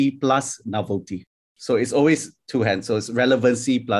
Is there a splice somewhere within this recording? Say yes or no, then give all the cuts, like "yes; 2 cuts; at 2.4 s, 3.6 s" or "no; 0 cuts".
no; 0 cuts